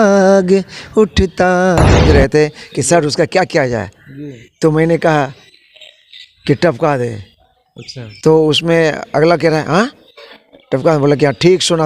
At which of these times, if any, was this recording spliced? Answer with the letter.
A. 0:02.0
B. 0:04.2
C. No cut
A